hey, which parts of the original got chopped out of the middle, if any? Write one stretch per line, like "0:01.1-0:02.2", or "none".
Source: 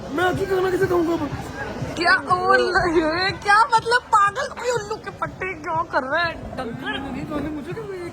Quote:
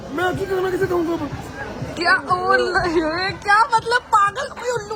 none